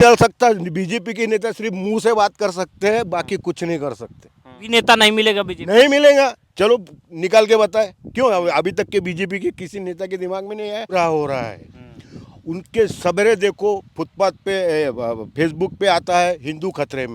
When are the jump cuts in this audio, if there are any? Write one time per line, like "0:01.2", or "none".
0:04.5
0:10.9

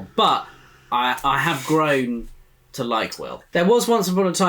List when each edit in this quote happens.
0:03.3

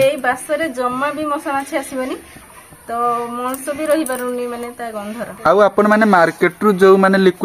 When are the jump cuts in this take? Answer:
none

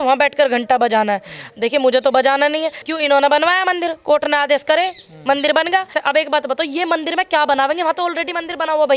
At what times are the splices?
0:02.8
0:05.9

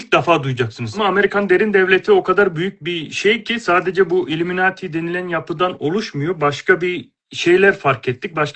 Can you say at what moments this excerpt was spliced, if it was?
0:01.0

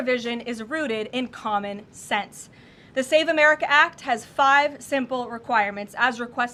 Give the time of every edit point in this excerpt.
none

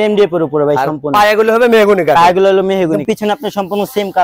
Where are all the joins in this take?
0:03.0

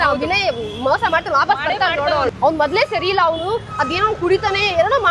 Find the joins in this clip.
0:02.3

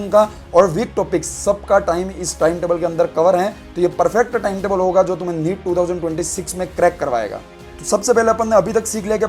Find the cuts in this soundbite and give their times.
none

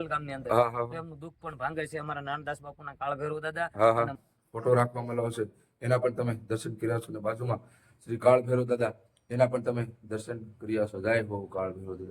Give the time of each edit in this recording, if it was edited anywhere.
0:04.1

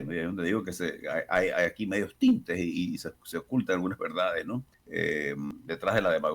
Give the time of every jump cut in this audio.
0:04.8
0:05.5

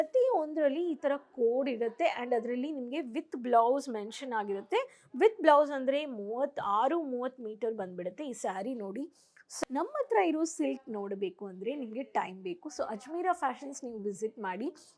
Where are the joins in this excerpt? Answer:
0:09.5

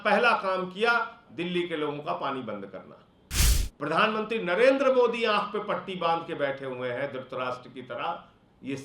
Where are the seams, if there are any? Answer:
0:03.6

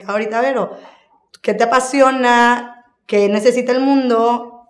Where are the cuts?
none

